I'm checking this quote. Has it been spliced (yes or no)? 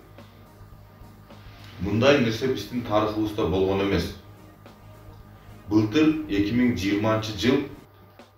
no